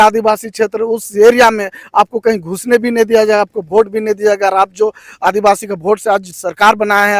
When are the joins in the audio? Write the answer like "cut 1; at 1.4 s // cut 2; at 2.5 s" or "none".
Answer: none